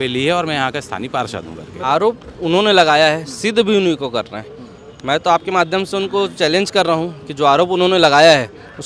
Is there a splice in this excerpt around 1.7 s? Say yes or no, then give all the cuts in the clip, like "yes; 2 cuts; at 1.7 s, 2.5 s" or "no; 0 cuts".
yes; 1 cut; at 1.7 s